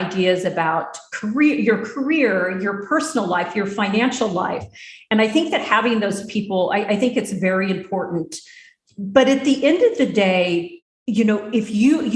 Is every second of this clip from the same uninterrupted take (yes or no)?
yes